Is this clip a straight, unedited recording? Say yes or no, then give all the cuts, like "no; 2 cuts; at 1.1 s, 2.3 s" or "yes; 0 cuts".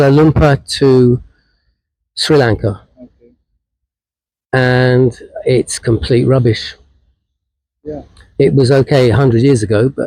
yes; 0 cuts